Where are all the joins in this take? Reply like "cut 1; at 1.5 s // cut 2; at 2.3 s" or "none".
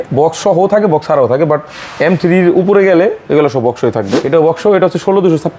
cut 1; at 4.2 s